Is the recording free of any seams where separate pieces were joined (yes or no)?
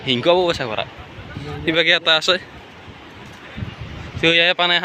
yes